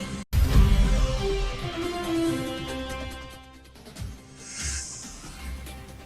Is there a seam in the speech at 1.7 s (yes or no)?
no